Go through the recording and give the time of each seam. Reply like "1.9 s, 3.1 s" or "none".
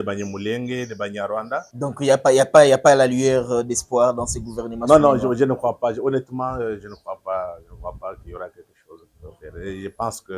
1.7 s